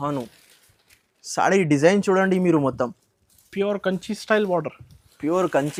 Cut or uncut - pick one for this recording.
uncut